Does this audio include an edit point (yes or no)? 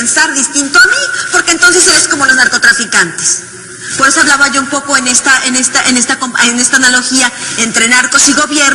no